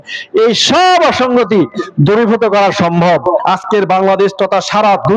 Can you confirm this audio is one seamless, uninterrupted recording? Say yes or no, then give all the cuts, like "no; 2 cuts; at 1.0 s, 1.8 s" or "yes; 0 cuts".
no; 1 cut; at 3.4 s